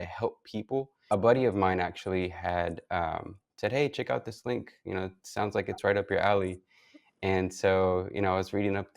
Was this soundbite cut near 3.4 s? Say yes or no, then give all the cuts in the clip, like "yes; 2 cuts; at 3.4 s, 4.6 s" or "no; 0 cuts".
no; 1 cut; at 1.0 s